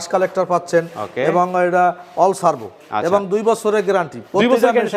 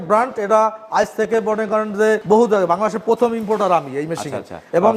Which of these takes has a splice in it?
second; 1 cut; at 2.2 s

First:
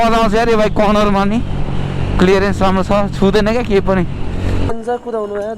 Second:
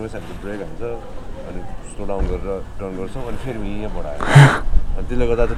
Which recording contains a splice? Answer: first; 1 cut; at 4.6 s

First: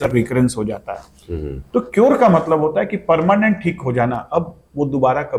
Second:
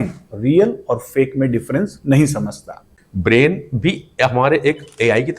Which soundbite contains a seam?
second; 1 cut; at 2.8 s

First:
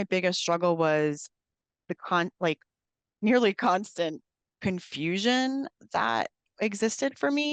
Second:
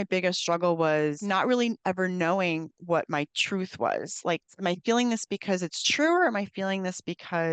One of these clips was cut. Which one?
second; 2 cuts; at 1.2 s, 4.5 s

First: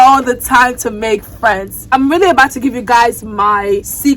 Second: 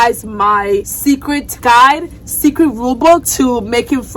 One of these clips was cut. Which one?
first; 1 cut; at 1.9 s

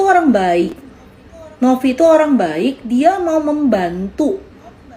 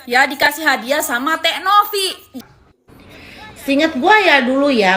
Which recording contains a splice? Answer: second; 1 cut; at 2.3 s

